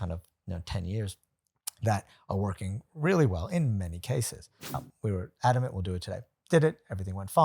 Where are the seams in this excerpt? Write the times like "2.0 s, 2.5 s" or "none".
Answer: 4.5 s